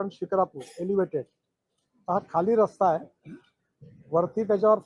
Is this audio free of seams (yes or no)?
yes